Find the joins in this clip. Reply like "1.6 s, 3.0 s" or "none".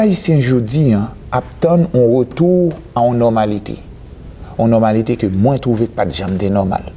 none